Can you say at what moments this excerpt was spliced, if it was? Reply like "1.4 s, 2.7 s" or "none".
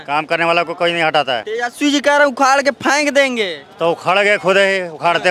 1.5 s